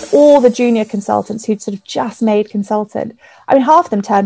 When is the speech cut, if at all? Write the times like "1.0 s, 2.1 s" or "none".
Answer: none